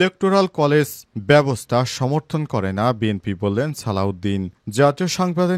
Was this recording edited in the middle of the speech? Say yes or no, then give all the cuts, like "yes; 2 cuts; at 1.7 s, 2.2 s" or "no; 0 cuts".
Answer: no; 0 cuts